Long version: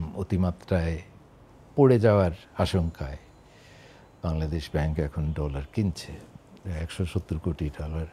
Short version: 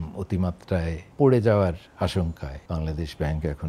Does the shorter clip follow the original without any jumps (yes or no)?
no